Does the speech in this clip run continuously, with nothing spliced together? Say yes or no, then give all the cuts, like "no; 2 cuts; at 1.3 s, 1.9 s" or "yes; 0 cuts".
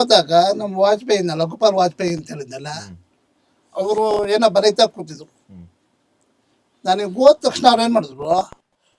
yes; 0 cuts